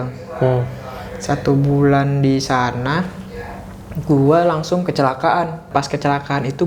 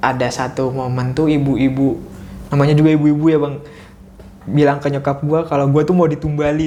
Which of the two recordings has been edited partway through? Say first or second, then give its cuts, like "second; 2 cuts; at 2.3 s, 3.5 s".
first; 1 cut; at 5.7 s